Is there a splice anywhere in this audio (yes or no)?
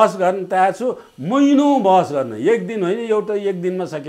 no